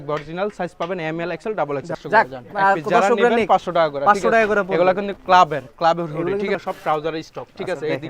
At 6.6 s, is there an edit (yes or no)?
yes